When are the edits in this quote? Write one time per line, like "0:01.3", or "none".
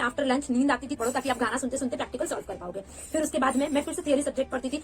0:01.0